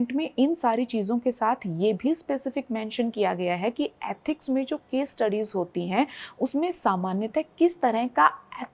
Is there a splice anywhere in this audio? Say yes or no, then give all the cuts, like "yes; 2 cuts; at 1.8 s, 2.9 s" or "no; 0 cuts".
no; 0 cuts